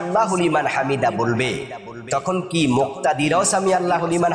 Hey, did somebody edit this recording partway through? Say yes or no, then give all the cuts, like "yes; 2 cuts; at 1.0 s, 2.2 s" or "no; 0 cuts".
no; 0 cuts